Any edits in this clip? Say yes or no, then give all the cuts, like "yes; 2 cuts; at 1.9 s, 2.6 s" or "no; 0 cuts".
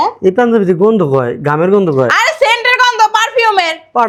no; 0 cuts